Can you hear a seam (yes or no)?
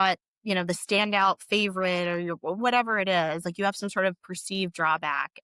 no